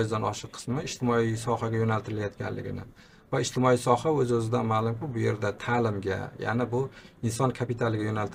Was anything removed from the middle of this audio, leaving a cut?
no; 0 cuts

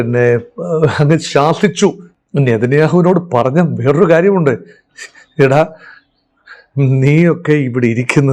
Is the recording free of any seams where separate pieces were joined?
no; 1 cut; at 2.1 s

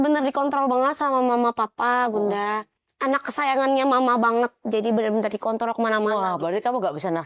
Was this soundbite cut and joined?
no; 0 cuts

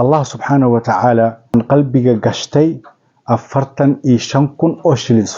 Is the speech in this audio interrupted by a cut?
yes; 1 cut; at 1.5 s

